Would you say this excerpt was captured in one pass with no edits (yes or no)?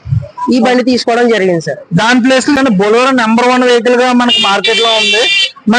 no